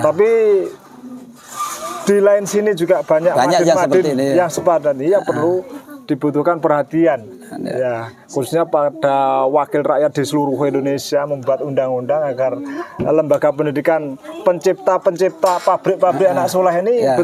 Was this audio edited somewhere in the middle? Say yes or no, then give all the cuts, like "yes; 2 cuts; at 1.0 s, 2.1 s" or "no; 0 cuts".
no; 0 cuts